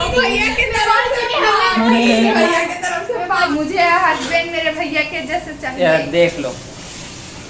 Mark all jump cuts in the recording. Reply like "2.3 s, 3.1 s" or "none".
3.5 s